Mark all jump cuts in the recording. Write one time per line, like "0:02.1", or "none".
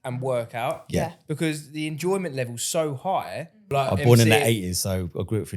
0:03.7